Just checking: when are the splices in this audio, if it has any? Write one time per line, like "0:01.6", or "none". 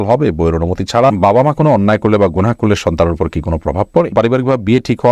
0:01.2
0:04.1